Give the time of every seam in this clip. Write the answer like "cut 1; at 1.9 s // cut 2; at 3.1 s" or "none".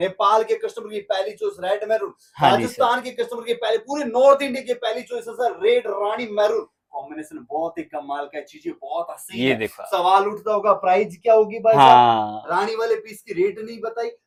none